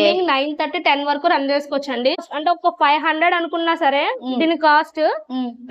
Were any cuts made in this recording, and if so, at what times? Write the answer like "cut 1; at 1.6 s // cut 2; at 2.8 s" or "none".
cut 1; at 2.2 s